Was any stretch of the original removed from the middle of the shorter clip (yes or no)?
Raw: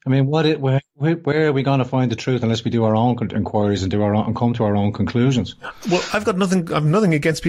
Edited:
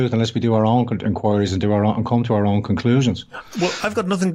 no